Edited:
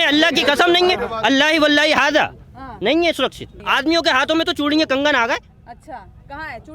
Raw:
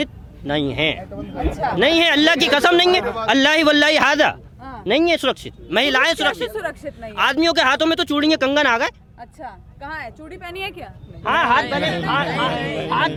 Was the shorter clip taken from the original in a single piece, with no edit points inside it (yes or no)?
no